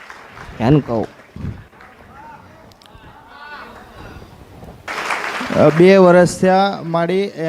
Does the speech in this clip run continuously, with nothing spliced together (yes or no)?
no